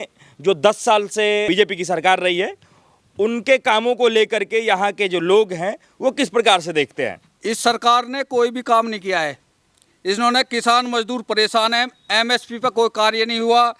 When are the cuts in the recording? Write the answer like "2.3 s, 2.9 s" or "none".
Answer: 1.5 s, 7.3 s